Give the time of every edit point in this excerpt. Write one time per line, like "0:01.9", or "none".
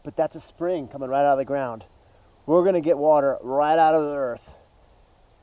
none